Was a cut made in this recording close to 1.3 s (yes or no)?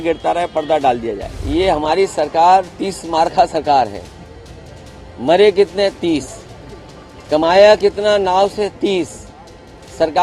yes